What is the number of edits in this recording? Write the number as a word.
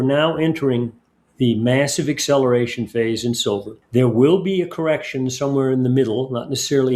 one